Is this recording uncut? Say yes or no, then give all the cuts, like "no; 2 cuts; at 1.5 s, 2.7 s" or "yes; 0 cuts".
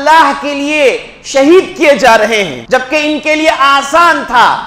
no; 1 cut; at 2.6 s